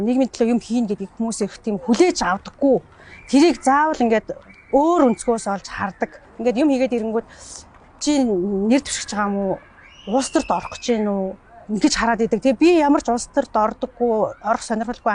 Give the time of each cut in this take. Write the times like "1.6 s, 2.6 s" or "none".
6.2 s